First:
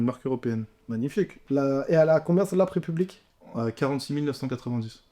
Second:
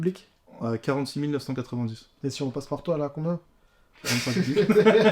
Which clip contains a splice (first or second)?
first